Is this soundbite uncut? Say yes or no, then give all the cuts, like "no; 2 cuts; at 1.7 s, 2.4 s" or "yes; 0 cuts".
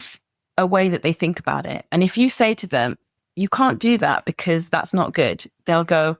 yes; 0 cuts